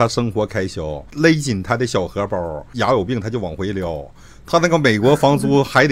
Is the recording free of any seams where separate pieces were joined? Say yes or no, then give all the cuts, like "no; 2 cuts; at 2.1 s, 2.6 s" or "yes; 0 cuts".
no; 2 cuts; at 1.1 s, 2.7 s